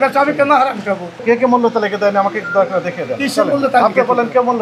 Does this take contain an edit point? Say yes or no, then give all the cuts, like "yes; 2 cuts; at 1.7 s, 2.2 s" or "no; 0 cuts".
yes; 1 cut; at 1.1 s